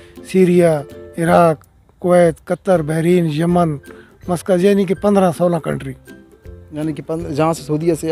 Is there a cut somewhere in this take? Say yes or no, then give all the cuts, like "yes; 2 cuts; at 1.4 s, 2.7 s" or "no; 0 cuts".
no; 0 cuts